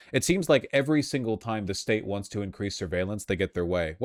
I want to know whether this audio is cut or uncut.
uncut